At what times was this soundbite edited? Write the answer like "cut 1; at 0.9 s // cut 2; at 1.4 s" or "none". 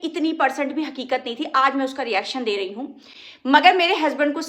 none